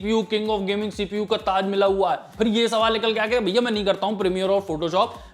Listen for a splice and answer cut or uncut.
cut